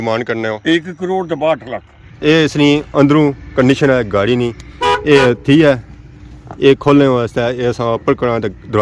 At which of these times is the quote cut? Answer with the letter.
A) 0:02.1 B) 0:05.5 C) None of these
A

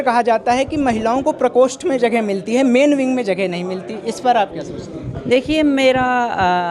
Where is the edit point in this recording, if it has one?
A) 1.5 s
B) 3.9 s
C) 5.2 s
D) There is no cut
D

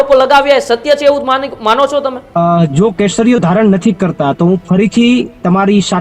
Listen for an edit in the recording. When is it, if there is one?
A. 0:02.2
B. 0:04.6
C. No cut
A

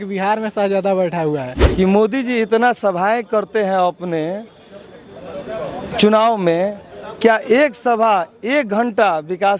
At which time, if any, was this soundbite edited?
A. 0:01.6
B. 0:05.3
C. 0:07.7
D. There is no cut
A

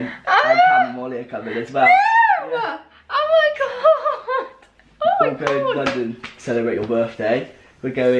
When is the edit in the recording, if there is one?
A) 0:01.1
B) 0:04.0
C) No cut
C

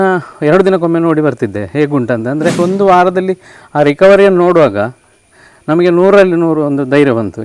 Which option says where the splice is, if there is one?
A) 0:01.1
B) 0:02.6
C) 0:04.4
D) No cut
B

